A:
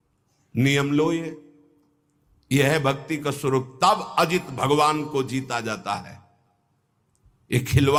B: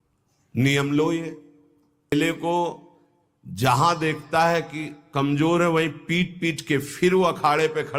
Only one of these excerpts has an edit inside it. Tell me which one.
B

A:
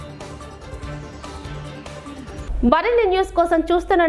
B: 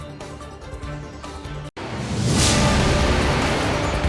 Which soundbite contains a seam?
B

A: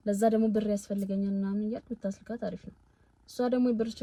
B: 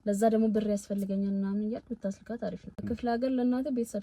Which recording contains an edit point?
B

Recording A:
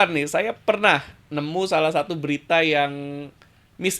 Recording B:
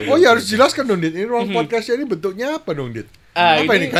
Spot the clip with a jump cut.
A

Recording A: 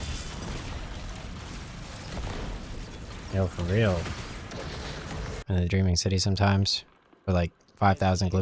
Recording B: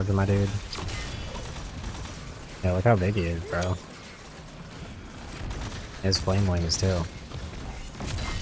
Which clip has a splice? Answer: A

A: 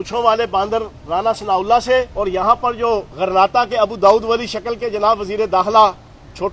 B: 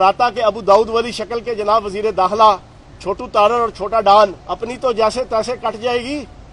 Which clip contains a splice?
B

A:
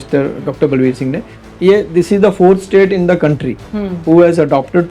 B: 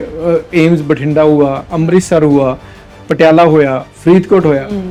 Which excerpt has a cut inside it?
A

